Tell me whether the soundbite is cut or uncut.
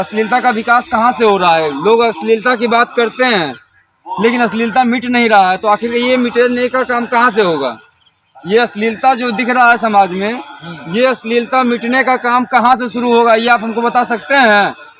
uncut